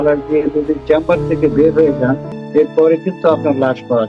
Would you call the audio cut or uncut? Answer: cut